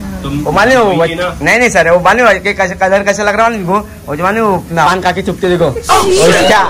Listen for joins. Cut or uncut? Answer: uncut